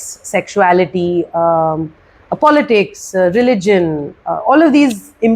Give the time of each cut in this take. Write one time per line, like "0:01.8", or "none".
none